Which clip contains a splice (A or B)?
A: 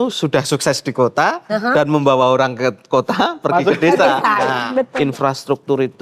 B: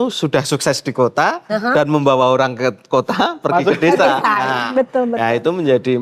A